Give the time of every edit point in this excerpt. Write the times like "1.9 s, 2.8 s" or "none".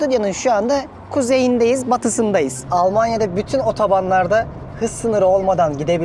2.6 s